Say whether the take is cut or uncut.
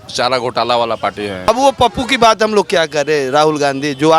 cut